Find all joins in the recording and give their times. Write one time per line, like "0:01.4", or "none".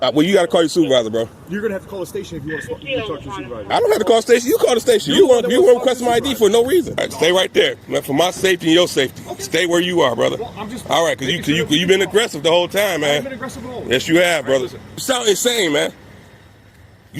0:07.0
0:14.9